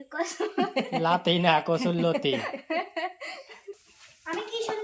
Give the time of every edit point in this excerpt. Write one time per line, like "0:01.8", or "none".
0:03.8